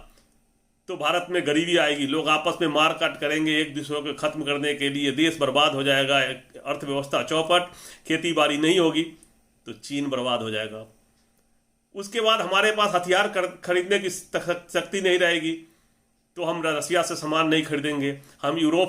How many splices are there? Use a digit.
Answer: 0